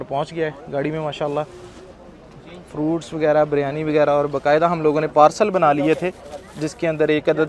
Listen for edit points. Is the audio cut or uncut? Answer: uncut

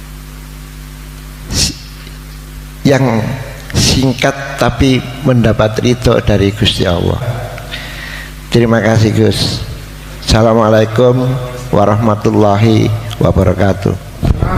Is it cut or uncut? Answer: cut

